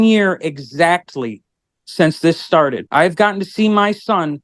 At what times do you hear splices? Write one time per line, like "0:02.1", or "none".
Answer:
0:02.8